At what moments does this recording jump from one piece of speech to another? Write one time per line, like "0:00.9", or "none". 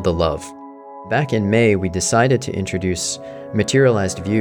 0:01.1